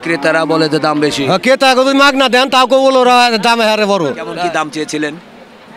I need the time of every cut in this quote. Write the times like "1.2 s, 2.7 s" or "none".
4.3 s